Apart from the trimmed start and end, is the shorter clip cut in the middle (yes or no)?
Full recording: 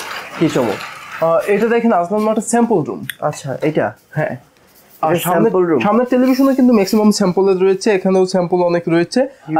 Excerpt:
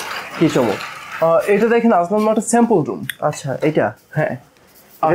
no